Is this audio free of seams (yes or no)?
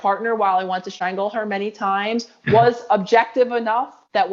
no